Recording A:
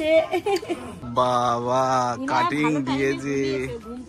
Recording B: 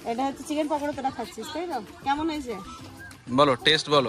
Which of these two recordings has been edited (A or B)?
A